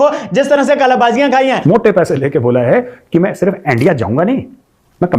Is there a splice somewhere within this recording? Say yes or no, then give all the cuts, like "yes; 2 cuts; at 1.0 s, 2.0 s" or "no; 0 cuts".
yes; 1 cut; at 1.6 s